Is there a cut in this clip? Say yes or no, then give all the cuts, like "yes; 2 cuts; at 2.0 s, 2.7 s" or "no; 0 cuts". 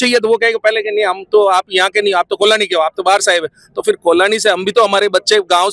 no; 0 cuts